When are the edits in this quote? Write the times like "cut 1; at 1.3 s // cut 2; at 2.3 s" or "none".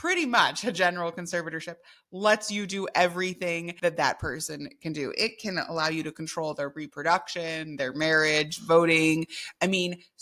cut 1; at 3.7 s